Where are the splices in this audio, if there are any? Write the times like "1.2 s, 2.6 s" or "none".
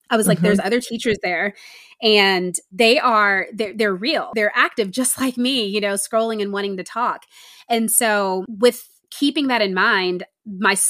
2.6 s, 4.3 s, 8.5 s